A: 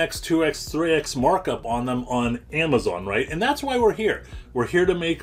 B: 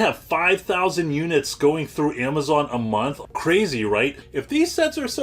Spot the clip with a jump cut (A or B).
B